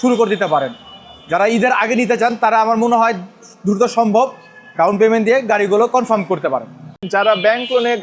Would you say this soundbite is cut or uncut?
cut